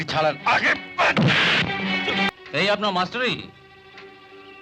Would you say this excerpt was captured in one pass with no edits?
no; 1 cut; at 2.3 s

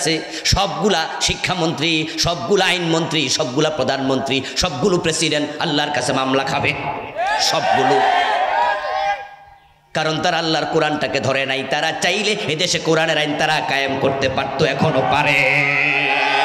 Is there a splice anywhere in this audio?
no; 0 cuts

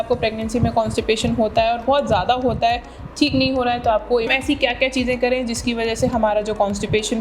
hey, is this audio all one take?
no; 1 cut; at 4.3 s

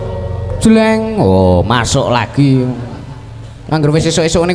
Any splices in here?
no; 0 cuts

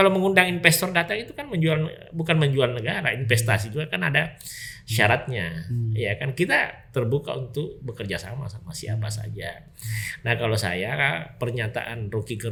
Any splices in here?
no; 0 cuts

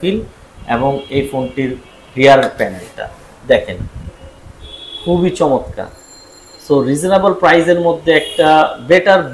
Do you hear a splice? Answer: no; 0 cuts

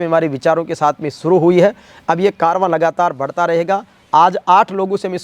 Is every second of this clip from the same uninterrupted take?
yes; 0 cuts

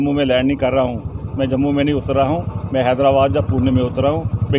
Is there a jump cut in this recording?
no; 0 cuts

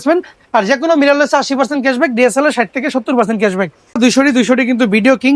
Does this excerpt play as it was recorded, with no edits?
no; 1 cut; at 4.0 s

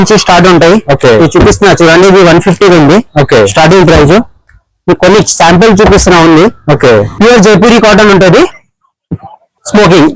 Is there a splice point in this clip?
yes; 1 cut; at 7.1 s

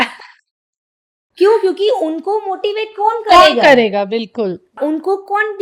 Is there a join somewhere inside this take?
yes; 1 cut; at 4.7 s

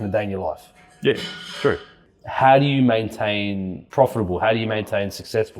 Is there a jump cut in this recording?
yes; 2 cuts; at 1.9 s, 3.8 s

